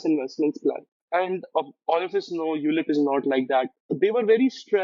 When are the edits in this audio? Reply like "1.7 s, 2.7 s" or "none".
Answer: 0.9 s, 3.9 s